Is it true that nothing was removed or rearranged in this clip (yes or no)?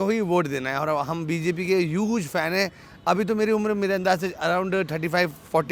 yes